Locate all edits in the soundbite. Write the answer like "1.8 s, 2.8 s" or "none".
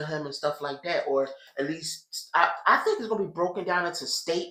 none